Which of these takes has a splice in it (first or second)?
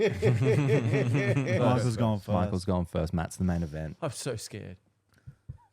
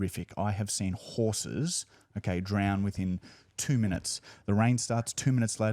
first